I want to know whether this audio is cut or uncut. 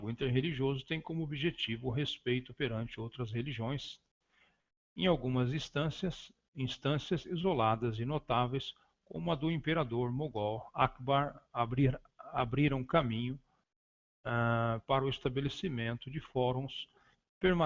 cut